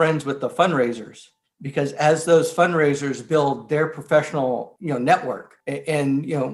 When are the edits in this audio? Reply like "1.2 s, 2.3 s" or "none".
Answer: none